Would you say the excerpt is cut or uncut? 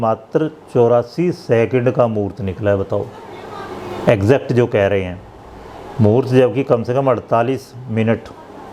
uncut